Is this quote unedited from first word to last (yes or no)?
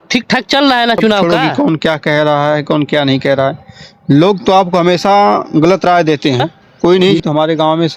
no